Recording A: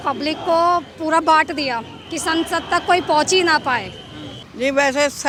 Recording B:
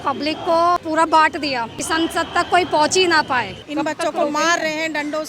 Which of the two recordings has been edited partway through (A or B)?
B